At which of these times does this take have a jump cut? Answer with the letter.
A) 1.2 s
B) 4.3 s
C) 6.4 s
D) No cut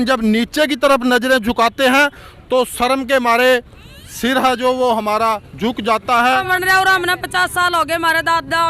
C